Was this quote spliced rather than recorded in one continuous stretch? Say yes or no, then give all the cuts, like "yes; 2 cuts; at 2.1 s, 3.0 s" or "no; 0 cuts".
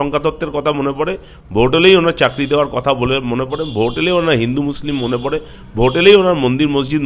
no; 0 cuts